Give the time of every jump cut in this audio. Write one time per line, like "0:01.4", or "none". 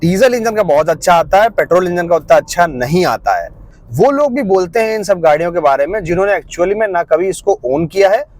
0:03.8